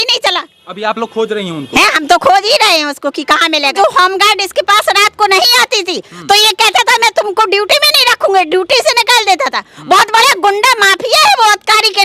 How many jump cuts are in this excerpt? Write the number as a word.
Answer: one